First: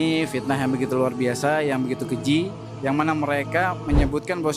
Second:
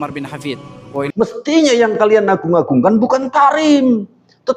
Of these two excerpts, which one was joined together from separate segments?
second; 1 cut; at 1.1 s

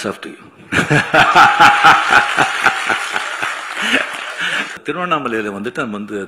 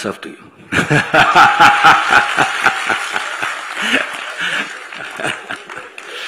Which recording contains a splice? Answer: first; 1 cut; at 4.8 s

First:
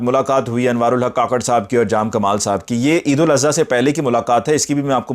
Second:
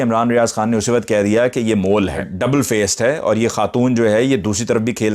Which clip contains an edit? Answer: second; 1 cut; at 2.3 s

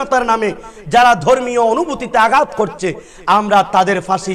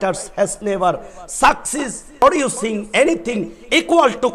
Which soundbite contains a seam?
second; 1 cut; at 2.2 s

